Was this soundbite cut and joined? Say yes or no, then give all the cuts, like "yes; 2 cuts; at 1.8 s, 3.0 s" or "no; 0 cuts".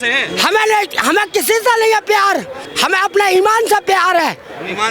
yes; 1 cut; at 2.6 s